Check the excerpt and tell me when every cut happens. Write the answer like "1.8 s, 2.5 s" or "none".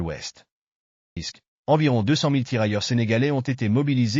1.2 s